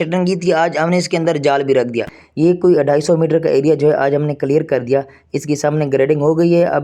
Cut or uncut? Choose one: cut